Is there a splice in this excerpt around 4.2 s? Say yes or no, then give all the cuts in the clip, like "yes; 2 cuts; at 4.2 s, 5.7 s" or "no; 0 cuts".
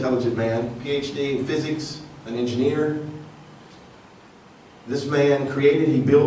yes; 1 cut; at 4.2 s